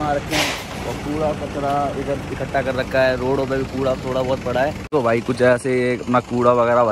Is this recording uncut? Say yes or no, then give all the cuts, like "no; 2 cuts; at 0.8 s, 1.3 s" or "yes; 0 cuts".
no; 1 cut; at 4.9 s